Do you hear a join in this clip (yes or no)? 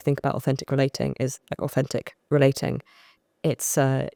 no